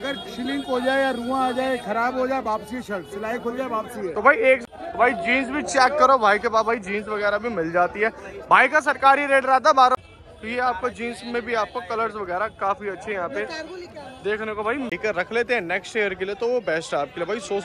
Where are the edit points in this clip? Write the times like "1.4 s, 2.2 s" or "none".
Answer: 4.6 s, 9.9 s, 14.9 s